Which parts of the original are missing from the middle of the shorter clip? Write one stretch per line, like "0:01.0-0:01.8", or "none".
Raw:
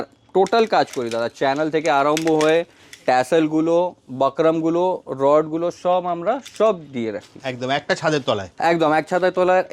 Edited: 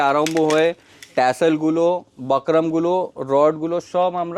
none